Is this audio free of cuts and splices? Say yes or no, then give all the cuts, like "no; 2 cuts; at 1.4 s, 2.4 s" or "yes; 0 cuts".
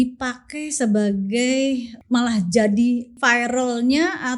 no; 2 cuts; at 1.9 s, 3.2 s